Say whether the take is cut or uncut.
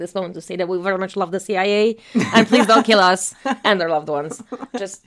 uncut